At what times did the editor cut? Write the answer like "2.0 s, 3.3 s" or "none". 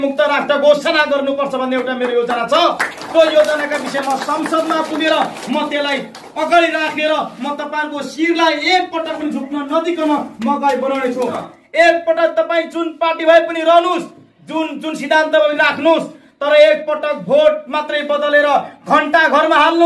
11.5 s